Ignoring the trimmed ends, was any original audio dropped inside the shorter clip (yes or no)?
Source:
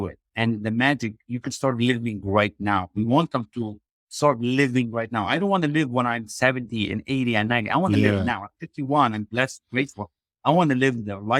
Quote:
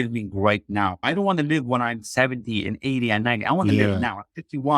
yes